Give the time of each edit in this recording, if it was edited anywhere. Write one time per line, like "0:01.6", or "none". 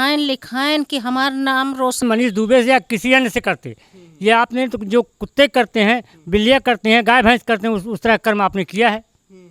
0:02.0